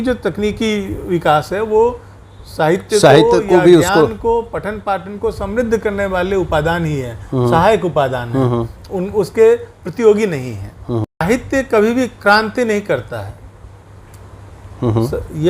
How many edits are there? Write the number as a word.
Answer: one